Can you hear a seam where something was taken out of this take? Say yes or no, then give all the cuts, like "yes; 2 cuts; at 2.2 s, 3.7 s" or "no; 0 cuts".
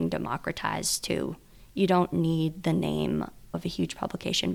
no; 0 cuts